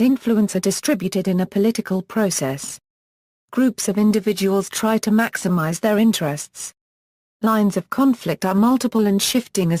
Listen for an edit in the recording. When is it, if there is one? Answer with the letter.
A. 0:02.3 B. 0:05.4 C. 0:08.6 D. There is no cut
B